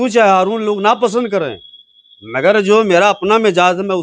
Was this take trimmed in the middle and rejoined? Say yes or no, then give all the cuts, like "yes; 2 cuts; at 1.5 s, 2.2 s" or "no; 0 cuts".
no; 0 cuts